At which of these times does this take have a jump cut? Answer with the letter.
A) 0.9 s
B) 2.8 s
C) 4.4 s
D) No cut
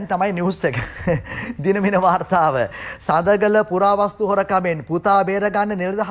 D